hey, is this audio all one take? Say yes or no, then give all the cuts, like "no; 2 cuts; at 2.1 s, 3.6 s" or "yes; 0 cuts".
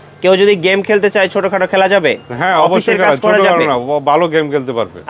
yes; 0 cuts